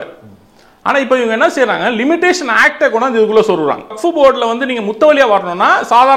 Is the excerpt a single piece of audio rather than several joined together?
no; 1 cut; at 4.0 s

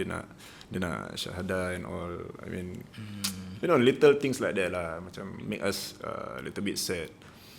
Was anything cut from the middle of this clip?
no; 0 cuts

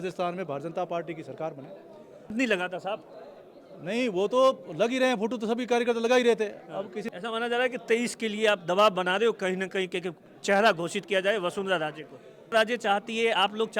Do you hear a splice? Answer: yes; 3 cuts; at 2.3 s, 7.0 s, 12.5 s

